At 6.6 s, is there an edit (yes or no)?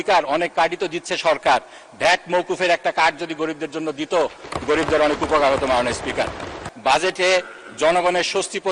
yes